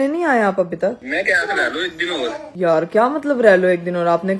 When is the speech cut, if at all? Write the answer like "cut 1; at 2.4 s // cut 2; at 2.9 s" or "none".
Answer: none